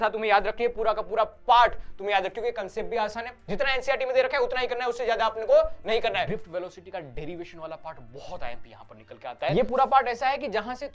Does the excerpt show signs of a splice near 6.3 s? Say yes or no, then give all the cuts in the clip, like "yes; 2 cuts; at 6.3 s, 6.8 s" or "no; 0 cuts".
yes; 2 cuts; at 6.3 s, 9.5 s